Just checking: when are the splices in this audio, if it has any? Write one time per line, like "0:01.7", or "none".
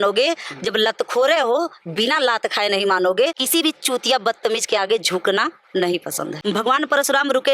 0:03.4
0:06.4